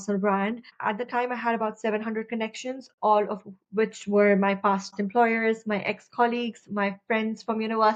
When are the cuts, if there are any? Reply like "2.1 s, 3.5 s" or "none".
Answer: none